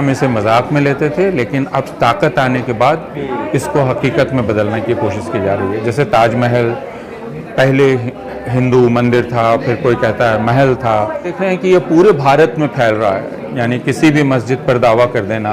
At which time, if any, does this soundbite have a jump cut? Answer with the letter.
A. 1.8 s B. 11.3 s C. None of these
B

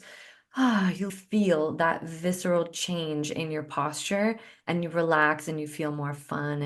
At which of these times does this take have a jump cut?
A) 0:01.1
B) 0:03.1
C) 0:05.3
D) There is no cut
A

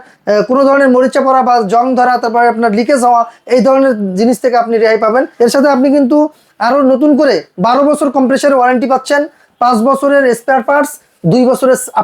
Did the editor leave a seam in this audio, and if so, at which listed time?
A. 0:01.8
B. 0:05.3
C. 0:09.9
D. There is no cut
B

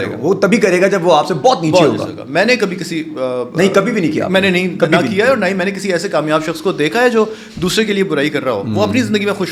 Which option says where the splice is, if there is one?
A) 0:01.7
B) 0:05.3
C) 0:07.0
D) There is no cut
D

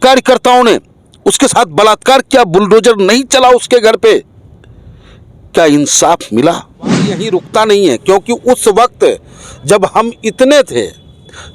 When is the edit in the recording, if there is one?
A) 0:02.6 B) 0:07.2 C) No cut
B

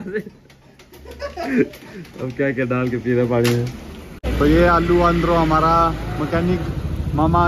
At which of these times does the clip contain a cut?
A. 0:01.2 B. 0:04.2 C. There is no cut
B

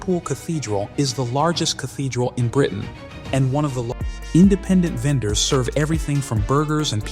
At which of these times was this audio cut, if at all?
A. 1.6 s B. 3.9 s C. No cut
B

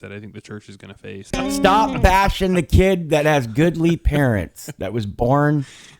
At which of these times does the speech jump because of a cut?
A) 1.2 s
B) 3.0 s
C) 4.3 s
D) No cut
A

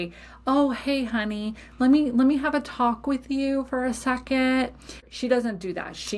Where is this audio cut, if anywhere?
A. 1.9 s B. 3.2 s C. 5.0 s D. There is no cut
C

